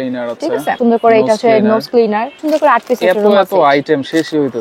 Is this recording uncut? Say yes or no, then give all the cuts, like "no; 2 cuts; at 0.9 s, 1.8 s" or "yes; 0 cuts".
no; 2 cuts; at 0.8 s, 2.4 s